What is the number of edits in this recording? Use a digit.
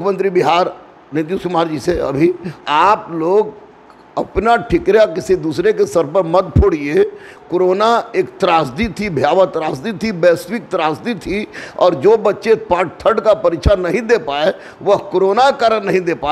1